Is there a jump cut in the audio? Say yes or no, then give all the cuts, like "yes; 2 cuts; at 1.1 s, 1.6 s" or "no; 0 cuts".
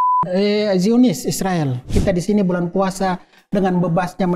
yes; 1 cut; at 1.9 s